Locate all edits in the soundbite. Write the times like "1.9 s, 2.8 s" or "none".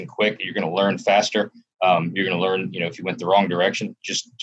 none